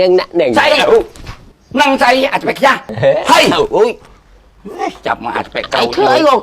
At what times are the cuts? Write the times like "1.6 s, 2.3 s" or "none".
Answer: 2.9 s